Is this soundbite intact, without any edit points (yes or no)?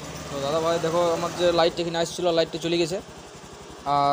yes